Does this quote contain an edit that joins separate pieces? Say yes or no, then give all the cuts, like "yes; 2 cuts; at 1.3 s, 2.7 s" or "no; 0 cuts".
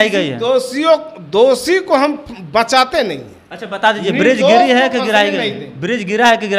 no; 0 cuts